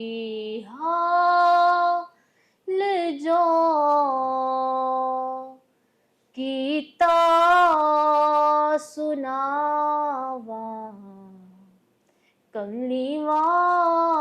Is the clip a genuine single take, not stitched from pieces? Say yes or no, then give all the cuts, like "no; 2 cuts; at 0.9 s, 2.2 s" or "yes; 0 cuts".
yes; 0 cuts